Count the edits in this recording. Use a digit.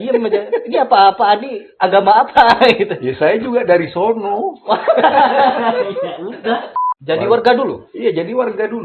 1